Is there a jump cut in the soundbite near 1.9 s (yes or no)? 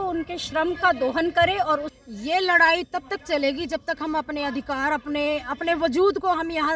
yes